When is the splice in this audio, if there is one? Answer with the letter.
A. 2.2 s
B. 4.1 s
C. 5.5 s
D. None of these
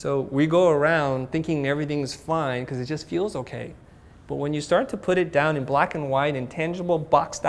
D